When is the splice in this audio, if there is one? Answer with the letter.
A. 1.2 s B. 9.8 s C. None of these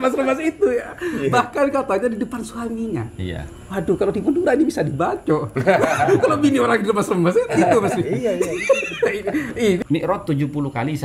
B